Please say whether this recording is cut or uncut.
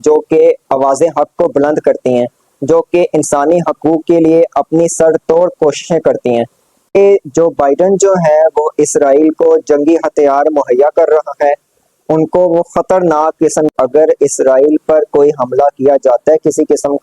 cut